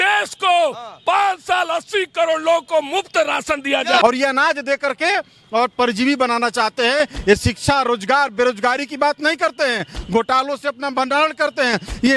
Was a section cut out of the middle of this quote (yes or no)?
yes